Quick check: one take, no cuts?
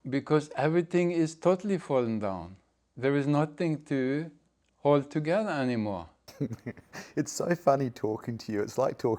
no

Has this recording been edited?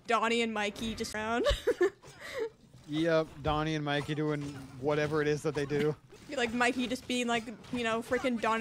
yes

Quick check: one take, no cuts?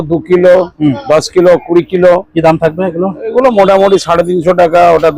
yes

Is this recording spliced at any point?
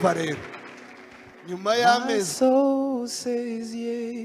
yes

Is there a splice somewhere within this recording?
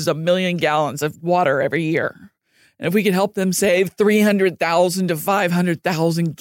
no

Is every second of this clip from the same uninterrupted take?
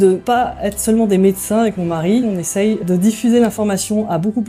yes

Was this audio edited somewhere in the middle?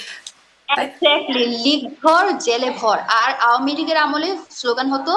no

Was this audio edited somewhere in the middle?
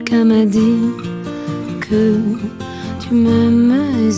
no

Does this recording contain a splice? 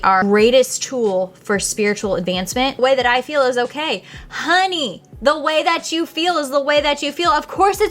yes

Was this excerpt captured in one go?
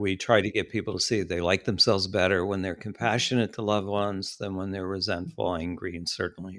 yes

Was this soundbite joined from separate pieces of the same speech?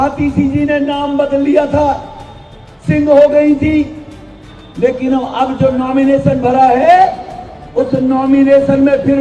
no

